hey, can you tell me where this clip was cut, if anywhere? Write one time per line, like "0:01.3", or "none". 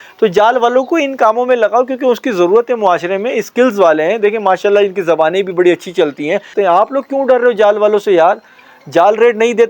0:06.5